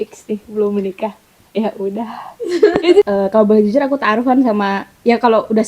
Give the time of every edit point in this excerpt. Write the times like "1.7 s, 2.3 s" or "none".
3.1 s

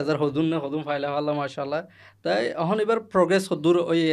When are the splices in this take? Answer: none

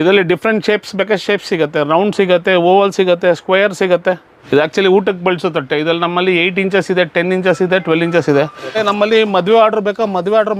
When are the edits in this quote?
4.3 s, 8.8 s

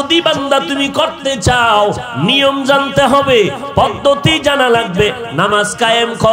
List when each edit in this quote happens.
none

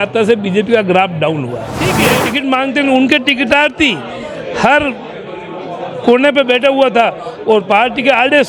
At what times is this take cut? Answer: 2.1 s

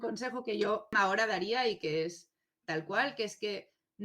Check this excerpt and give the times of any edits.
0.9 s

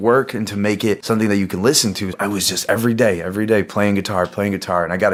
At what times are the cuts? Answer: none

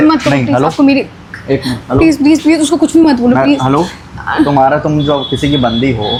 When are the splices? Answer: none

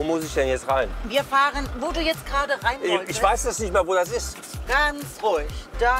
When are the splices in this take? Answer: none

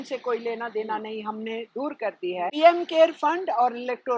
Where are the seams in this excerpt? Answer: 2.6 s

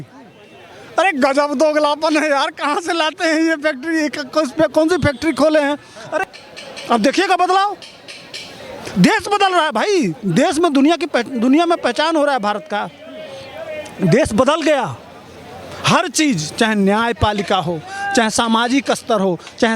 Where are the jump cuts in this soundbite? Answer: 6.3 s

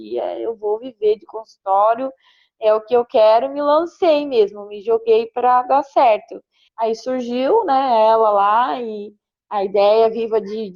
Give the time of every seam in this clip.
none

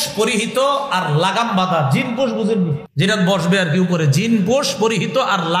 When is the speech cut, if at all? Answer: 2.8 s

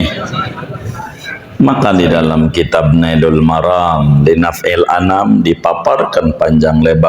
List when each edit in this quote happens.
1.3 s

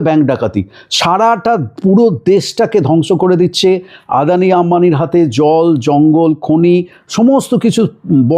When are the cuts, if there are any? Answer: none

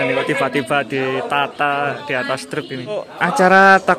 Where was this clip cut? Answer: 3.0 s

